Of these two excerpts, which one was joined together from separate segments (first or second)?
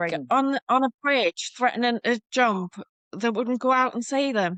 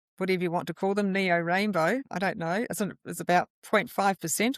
second